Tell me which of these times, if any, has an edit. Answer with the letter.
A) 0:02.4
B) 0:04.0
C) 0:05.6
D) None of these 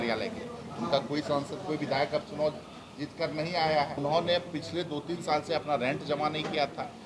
B